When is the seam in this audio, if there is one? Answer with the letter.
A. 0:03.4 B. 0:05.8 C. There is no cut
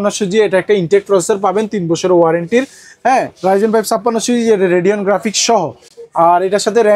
C